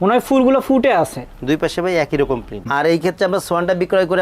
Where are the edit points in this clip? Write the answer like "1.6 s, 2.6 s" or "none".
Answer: 2.7 s